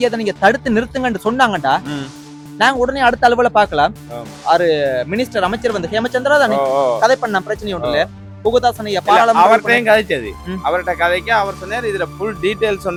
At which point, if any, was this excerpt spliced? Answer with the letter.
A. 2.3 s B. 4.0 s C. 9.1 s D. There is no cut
D